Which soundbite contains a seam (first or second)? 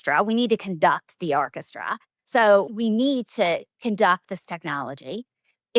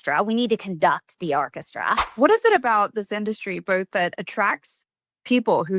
second